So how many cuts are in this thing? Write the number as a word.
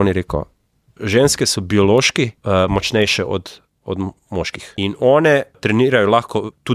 three